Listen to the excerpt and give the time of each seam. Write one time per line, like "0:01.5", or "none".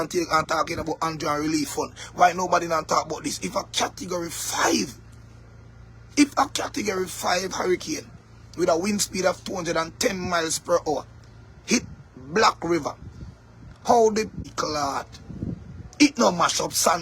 0:14.5